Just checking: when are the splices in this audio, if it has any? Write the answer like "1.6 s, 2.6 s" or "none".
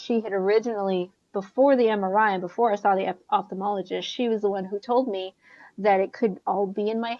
none